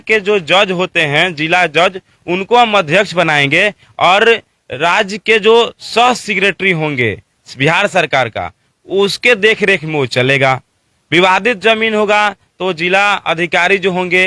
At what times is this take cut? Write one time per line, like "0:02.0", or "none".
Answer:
none